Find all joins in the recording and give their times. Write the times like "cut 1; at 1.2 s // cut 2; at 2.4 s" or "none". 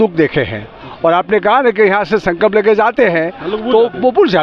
none